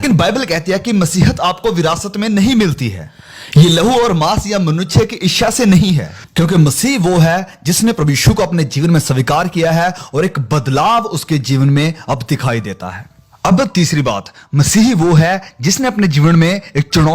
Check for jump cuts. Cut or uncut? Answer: cut